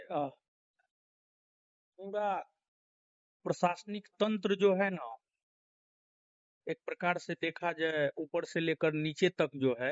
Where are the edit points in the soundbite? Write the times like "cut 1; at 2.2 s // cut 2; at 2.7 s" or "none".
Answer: none